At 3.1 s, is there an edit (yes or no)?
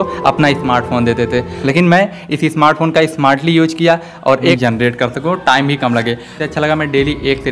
no